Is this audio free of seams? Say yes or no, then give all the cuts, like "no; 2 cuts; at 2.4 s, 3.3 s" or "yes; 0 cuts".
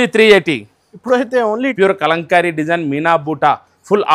no; 1 cut; at 1.7 s